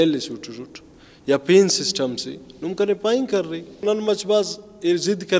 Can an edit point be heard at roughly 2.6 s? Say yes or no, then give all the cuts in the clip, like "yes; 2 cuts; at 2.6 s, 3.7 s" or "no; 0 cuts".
no; 1 cut; at 3.8 s